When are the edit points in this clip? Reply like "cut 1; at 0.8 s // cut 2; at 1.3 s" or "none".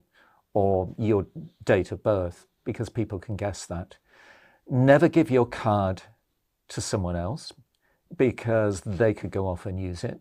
none